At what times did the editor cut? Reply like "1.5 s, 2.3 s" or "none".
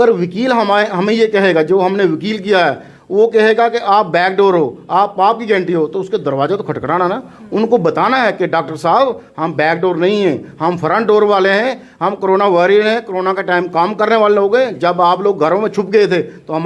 none